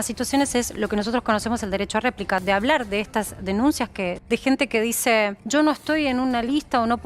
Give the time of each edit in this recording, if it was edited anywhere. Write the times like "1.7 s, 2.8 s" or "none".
2.4 s, 4.2 s, 5.4 s